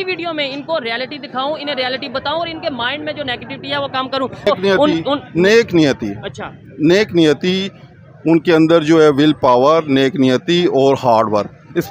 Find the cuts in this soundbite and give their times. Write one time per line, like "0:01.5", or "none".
0:04.5